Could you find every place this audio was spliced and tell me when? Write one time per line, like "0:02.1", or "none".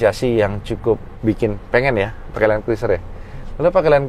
0:01.1